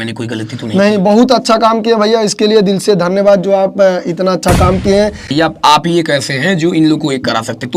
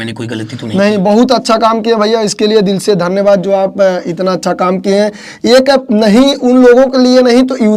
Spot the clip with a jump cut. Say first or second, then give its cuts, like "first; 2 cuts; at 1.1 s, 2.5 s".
first; 1 cut; at 5.2 s